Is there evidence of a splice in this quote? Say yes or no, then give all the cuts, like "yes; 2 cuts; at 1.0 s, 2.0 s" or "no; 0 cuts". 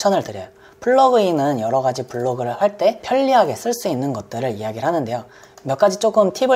yes; 1 cut; at 3.0 s